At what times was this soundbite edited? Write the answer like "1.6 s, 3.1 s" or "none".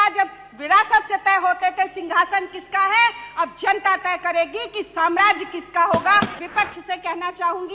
6.4 s

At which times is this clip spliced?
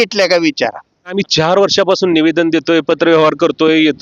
1.1 s

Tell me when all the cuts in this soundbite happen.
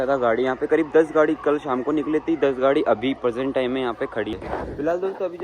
4.3 s

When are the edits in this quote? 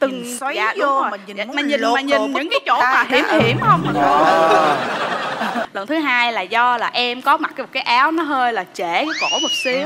5.6 s

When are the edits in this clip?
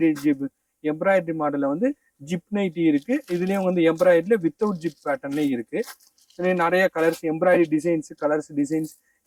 none

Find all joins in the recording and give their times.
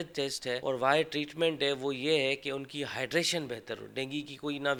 none

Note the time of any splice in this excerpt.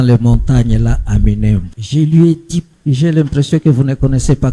1.8 s, 2.7 s

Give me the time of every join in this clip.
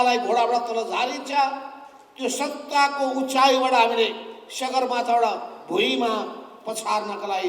none

